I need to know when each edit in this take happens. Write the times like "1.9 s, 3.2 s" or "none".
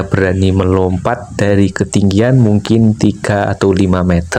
none